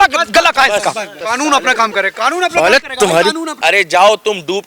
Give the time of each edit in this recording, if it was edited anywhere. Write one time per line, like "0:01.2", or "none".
0:01.1
0:03.5